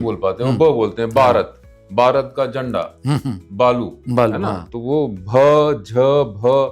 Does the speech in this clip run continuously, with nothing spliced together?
yes; 0 cuts

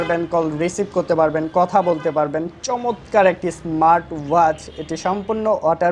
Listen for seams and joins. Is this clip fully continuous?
yes; 0 cuts

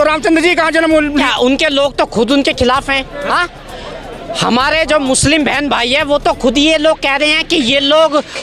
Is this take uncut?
no; 1 cut; at 1.2 s

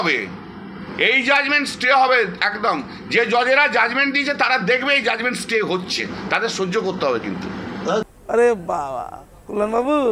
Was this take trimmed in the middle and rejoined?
yes; 1 cut; at 8.1 s

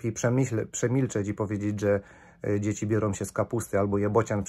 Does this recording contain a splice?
no; 0 cuts

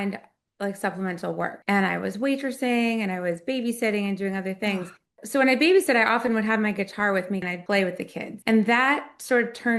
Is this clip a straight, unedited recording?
no; 3 cuts; at 1.6 s, 7.5 s, 8.3 s

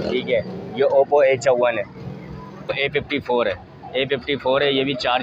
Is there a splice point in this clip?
yes; 1 cut; at 2.7 s

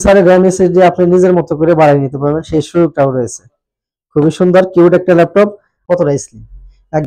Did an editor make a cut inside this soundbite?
yes; 1 cut; at 5.7 s

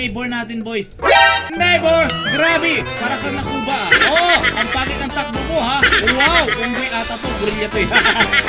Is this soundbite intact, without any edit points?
no; 1 cut; at 1.5 s

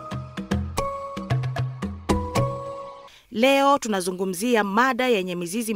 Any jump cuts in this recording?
yes; 1 cut; at 3.0 s

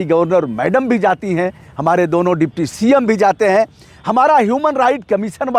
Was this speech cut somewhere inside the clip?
no; 0 cuts

